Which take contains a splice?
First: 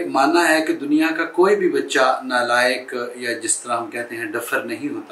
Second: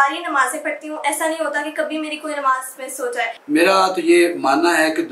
second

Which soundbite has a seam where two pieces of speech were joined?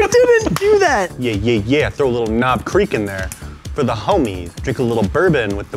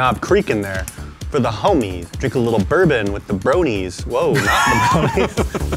first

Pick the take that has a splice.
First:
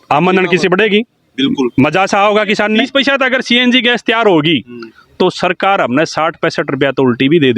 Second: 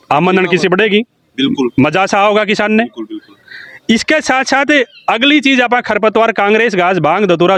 first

